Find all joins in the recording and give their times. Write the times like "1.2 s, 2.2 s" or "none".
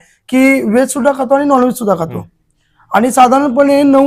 none

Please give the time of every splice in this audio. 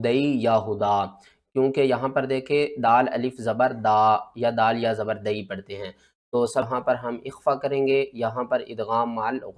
6.7 s

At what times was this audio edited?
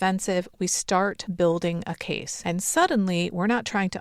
1.2 s, 2.3 s

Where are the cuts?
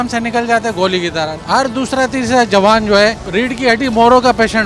1.4 s, 3.2 s

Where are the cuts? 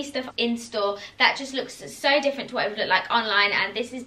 none

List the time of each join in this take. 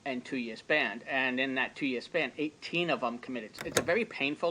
3.6 s

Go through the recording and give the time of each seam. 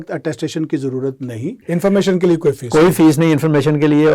1.6 s

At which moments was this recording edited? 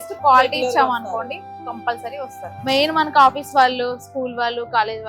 2.6 s

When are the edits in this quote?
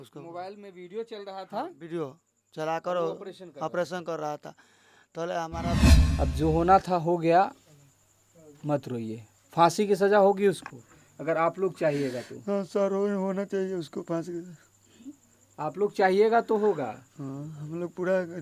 5.9 s

